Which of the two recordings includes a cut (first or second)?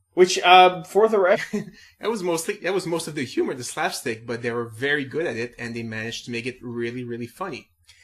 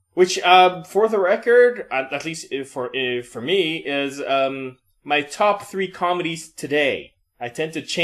second